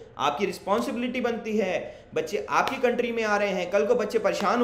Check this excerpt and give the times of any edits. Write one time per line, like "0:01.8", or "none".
none

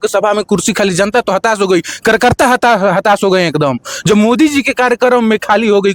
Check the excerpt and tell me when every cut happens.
none

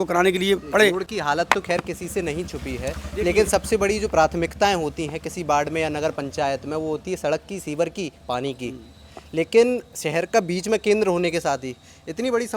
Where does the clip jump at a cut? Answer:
none

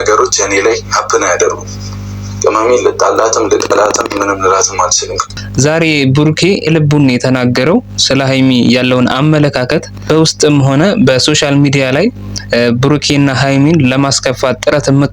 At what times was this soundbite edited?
0:05.4
0:06.7
0:10.0

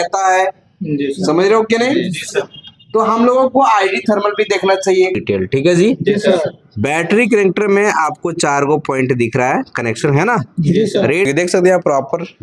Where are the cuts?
0:05.2
0:11.2

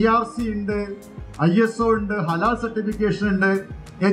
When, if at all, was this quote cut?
none

